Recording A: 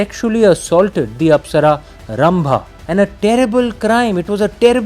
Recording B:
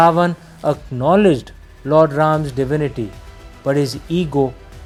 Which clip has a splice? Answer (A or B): A